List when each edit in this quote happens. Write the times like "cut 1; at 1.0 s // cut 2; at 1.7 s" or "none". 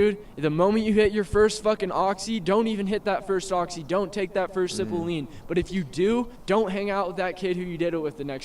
cut 1; at 6.3 s